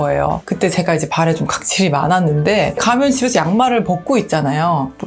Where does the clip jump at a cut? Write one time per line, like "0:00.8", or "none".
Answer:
none